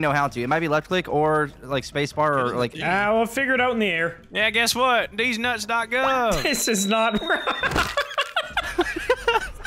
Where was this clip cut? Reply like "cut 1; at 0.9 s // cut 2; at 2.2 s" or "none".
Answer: none